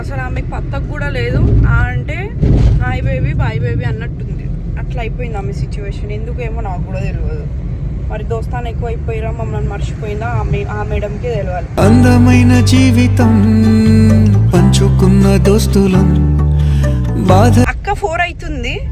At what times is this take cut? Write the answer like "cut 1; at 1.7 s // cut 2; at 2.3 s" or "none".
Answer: cut 1; at 17.8 s